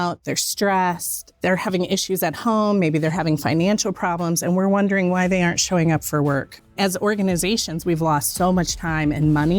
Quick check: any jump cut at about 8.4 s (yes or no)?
no